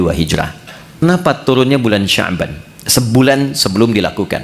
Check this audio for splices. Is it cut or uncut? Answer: cut